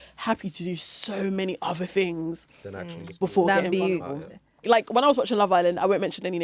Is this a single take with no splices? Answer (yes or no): no